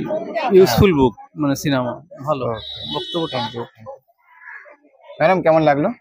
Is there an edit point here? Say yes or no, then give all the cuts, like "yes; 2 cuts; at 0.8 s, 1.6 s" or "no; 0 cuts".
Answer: no; 0 cuts